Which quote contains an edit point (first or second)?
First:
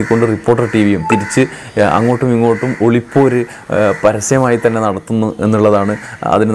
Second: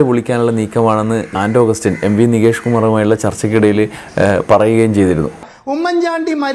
second